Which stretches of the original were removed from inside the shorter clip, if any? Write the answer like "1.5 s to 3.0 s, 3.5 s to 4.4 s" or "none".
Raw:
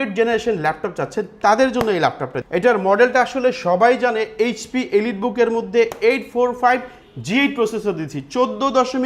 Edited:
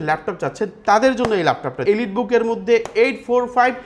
2.4 s to 4.9 s

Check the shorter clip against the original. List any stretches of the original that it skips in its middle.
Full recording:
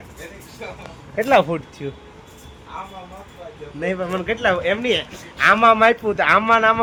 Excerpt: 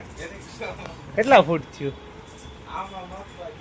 none

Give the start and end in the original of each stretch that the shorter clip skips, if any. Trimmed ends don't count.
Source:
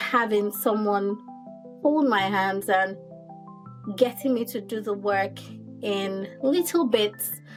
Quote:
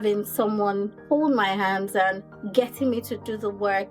1.2 s to 1.7 s, 3.1 s to 3.8 s

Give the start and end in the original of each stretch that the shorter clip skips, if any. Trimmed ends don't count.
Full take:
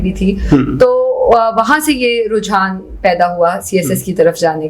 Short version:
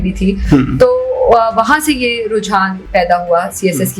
2.8 s to 2.9 s

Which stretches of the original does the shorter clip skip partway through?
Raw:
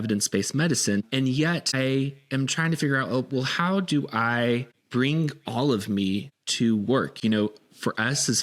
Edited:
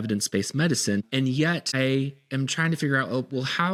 none

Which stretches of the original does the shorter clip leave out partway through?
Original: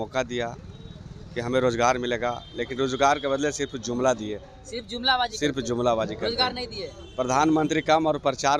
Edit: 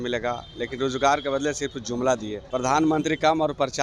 4.3 s to 7.0 s

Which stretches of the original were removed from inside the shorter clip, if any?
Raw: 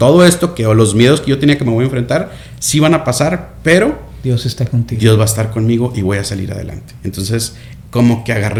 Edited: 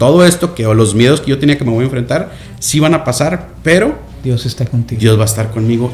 none

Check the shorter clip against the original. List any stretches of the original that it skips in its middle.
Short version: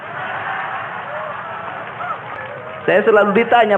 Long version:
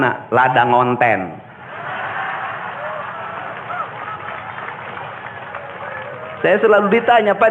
4.1 s to 5.9 s

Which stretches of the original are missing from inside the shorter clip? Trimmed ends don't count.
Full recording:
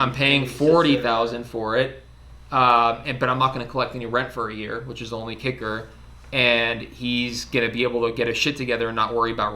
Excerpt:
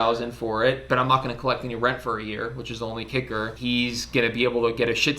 1.9 s to 3.1 s, 5.8 s to 6.9 s

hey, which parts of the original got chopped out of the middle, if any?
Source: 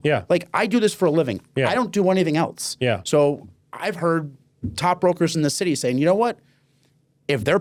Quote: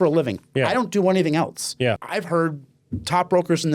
3.0 s to 3.7 s

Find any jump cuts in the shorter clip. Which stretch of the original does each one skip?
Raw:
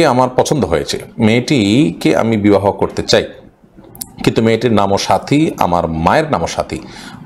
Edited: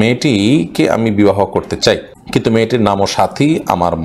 3.4 s to 4.1 s

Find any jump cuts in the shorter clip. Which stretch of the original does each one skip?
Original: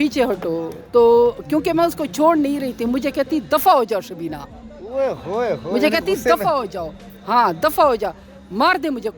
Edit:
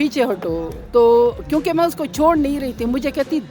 none

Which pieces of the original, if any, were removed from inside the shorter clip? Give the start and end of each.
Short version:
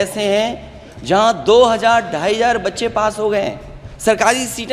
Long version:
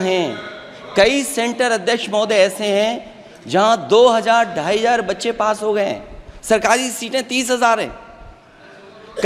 none

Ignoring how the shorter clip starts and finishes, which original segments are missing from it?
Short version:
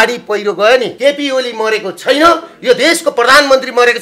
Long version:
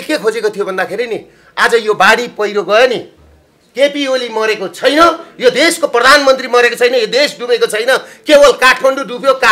3.0 s to 3.7 s

